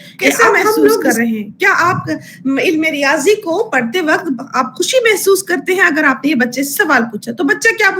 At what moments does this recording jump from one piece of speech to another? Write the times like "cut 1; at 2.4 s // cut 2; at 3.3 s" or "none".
cut 1; at 1.1 s